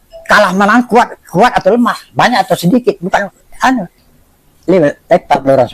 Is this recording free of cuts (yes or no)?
no